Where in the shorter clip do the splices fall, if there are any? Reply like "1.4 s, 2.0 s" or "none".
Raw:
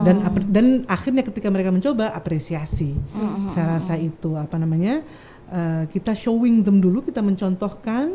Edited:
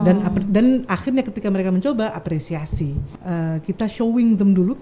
3.0 s